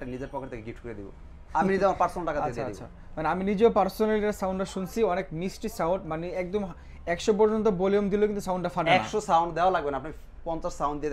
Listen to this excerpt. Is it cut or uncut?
uncut